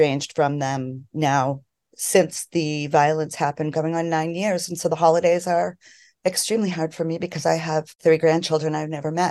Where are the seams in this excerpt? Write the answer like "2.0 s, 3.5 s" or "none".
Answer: 8.0 s